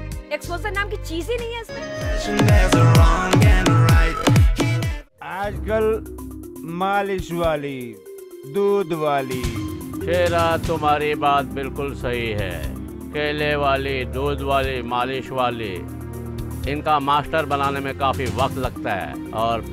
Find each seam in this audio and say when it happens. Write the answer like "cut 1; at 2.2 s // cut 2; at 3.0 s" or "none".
none